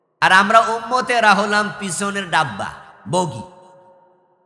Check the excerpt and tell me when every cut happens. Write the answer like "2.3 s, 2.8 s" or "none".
none